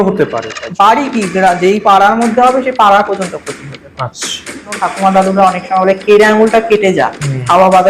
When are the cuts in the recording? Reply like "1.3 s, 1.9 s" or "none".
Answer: 4.5 s